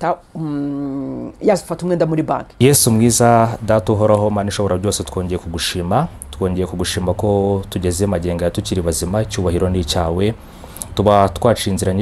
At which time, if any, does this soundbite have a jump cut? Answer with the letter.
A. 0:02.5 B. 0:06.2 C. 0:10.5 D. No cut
A